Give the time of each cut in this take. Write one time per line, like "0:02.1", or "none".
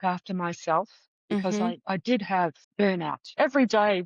0:02.7

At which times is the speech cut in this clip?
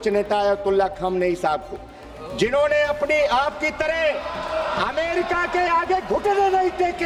none

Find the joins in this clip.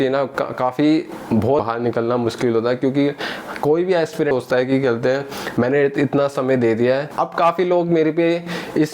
0:01.6
0:04.3
0:07.1

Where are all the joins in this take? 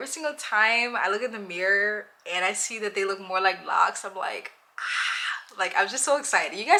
none

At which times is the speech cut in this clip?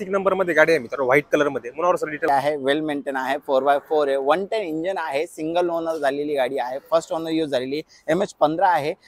0:02.3

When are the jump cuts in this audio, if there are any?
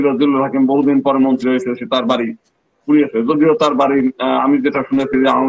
none

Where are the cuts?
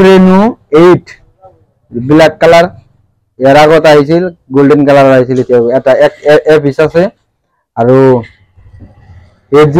none

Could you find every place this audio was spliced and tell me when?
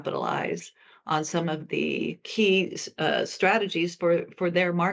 0:02.2

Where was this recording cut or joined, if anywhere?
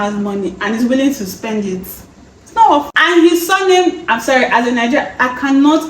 0:02.9

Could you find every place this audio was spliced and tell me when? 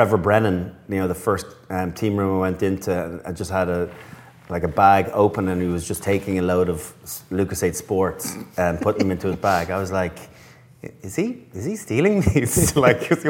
none

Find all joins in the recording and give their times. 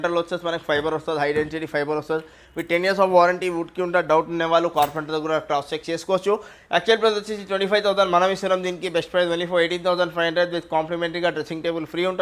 none

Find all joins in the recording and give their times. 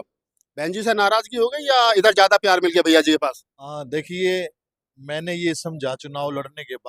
none

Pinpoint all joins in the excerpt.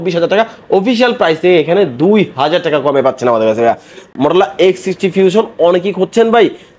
0:04.1

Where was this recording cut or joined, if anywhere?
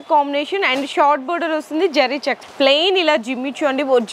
0:02.4

